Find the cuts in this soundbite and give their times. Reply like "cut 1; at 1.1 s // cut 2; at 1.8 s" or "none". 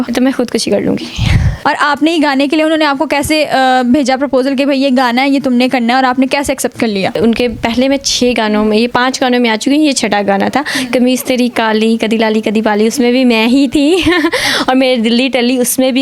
cut 1; at 1.6 s // cut 2; at 7.2 s